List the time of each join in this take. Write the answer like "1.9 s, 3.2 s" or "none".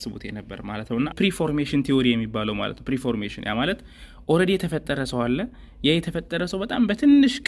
1.1 s